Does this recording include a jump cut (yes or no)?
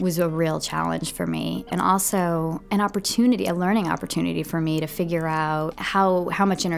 yes